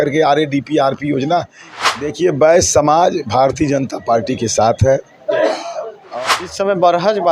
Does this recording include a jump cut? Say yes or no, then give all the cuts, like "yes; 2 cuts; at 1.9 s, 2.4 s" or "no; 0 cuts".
yes; 2 cuts; at 1.6 s, 6.0 s